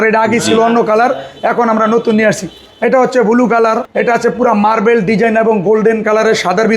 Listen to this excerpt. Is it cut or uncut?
cut